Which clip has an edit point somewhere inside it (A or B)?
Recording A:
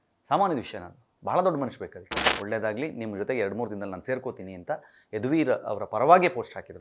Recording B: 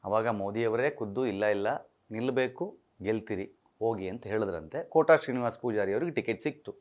A